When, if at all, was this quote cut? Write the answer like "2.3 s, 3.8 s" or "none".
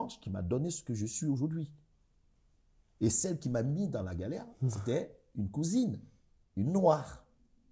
none